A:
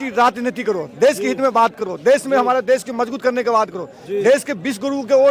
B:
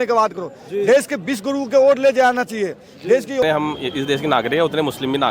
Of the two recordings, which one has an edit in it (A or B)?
B